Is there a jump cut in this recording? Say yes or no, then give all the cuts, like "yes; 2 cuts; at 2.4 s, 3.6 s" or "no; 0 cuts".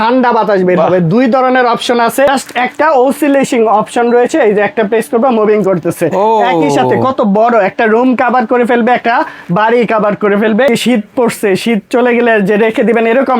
yes; 2 cuts; at 2.3 s, 10.7 s